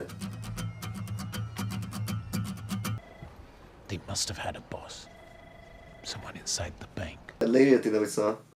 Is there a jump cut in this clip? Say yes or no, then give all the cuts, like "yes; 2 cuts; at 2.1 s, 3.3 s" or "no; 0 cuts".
yes; 2 cuts; at 3.0 s, 7.4 s